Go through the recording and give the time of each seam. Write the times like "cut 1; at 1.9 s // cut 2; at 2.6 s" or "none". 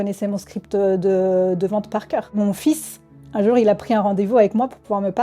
cut 1; at 2.4 s